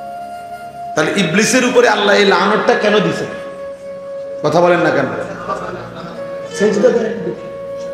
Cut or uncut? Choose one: cut